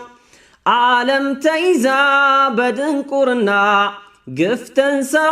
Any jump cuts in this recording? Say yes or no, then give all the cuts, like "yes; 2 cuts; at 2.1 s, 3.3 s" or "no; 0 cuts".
no; 0 cuts